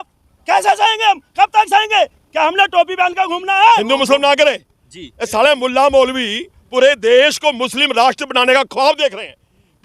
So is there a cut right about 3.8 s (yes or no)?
yes